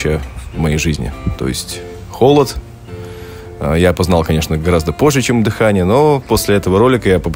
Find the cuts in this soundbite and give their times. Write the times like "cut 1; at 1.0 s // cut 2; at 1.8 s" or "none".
none